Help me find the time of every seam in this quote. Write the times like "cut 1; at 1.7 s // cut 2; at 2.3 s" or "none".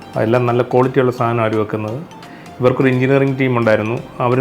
cut 1; at 2.2 s